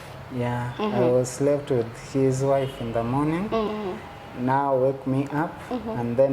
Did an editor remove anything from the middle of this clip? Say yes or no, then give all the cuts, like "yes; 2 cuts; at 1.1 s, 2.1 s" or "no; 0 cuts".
yes; 1 cut; at 3.7 s